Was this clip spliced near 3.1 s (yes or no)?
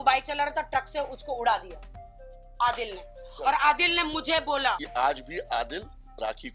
no